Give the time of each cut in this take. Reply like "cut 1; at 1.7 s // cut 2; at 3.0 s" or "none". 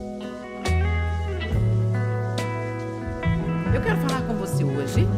none